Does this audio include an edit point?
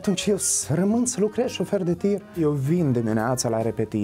yes; 1 cut; at 2.4 s

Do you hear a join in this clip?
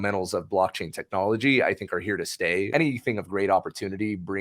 yes; 1 cut; at 2.7 s

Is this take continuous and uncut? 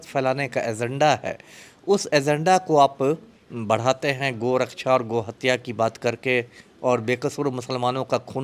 yes; 0 cuts

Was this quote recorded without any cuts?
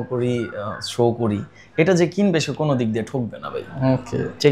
yes; 0 cuts

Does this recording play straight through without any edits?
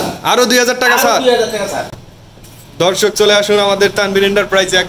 yes; 0 cuts

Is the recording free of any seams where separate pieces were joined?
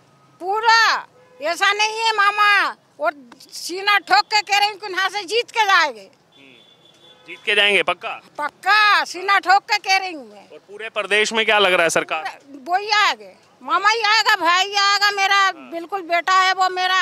yes; 0 cuts

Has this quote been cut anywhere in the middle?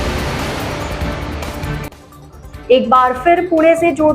yes; 1 cut; at 2.1 s

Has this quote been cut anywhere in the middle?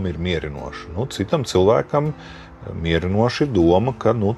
no; 0 cuts

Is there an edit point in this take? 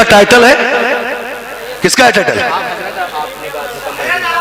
no; 0 cuts

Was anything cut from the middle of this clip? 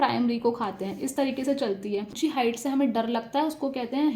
yes; 1 cut; at 2.1 s

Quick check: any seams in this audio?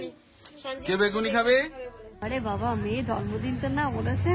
yes; 1 cut; at 2.2 s

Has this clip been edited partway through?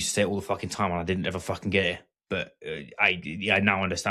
no; 0 cuts

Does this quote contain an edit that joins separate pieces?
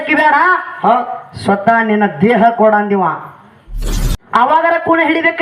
yes; 1 cut; at 3.9 s

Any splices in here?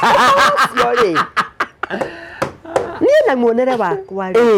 no; 0 cuts

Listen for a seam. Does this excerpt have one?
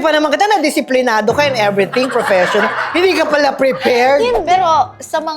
yes; 1 cut; at 4.5 s

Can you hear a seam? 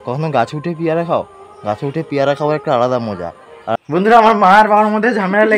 yes; 1 cut; at 3.8 s

